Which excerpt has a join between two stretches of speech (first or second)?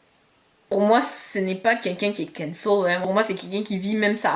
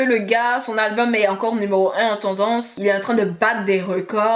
first